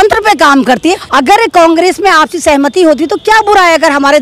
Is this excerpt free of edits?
no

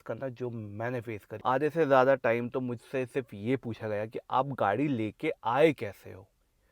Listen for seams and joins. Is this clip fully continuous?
no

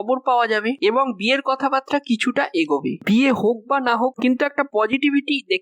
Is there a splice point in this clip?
no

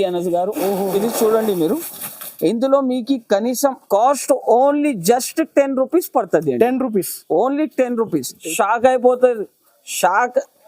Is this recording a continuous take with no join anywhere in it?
no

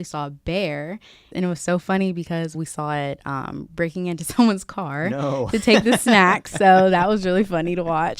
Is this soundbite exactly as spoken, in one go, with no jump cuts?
no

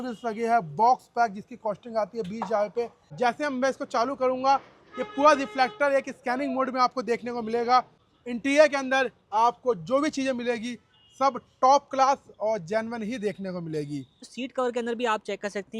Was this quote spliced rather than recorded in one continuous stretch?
yes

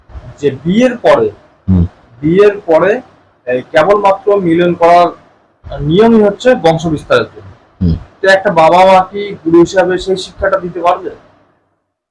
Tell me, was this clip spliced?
no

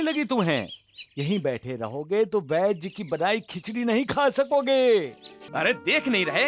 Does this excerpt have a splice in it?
yes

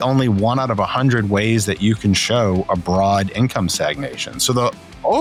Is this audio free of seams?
yes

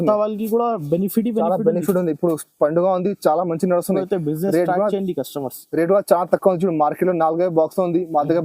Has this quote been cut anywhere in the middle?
no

